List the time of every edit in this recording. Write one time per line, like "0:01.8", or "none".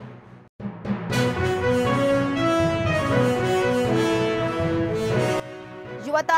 0:05.4